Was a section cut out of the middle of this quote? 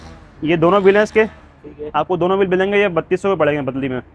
no; 0 cuts

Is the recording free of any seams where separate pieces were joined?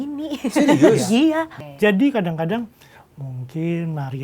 no; 1 cut; at 1.5 s

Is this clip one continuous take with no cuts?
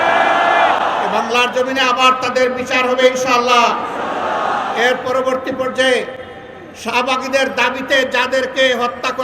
yes; 0 cuts

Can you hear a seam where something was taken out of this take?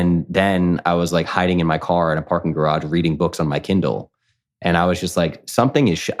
no; 0 cuts

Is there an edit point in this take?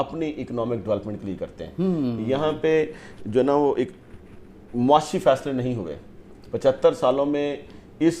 no; 0 cuts

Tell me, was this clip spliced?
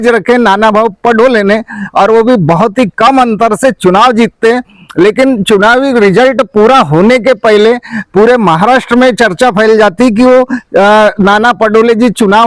no; 0 cuts

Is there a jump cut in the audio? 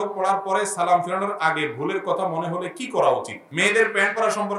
yes; 1 cut; at 3.4 s

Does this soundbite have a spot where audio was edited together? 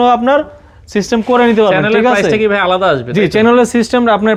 no; 0 cuts

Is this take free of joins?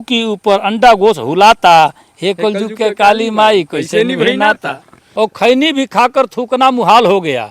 no; 1 cut; at 5.0 s

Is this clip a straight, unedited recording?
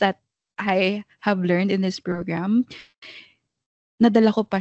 yes; 0 cuts

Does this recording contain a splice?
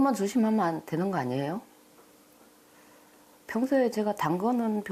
no; 0 cuts

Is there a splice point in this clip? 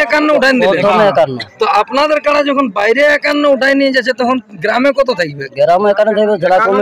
no; 0 cuts

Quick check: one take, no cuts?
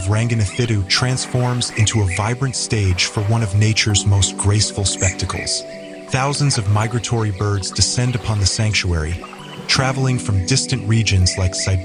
yes; 0 cuts

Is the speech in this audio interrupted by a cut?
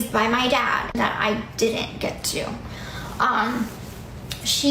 yes; 1 cut; at 0.9 s

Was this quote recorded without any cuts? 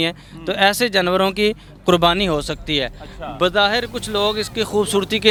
yes; 0 cuts

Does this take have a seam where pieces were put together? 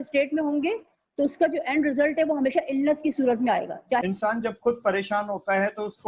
yes; 1 cut; at 4.0 s

